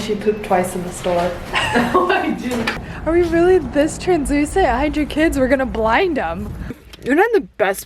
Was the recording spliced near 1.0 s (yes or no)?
no